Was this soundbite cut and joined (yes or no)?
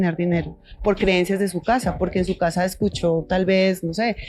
no